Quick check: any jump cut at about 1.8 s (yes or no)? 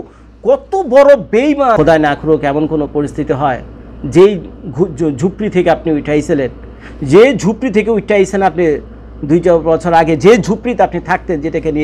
yes